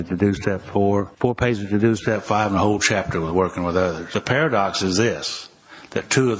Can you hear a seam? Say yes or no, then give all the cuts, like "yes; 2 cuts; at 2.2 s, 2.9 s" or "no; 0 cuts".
yes; 2 cuts; at 1.1 s, 4.1 s